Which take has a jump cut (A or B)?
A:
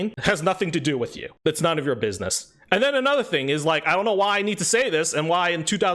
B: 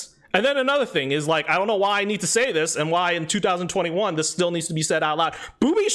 A